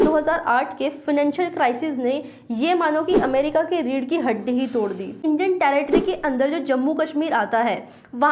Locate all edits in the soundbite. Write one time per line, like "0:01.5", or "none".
0:05.2